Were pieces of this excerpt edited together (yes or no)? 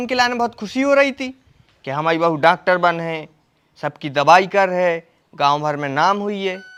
no